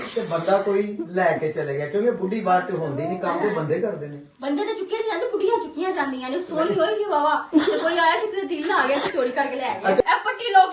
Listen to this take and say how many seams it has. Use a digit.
2